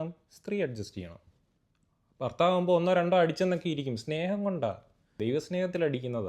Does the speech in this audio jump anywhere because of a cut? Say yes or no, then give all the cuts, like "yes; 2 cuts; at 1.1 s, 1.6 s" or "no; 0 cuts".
yes; 1 cut; at 5.1 s